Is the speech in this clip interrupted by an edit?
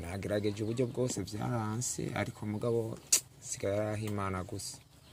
no; 0 cuts

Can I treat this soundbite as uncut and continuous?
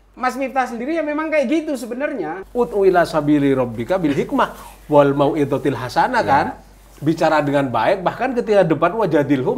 no; 1 cut; at 2.4 s

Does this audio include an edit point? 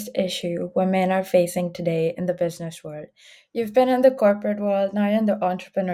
no; 0 cuts

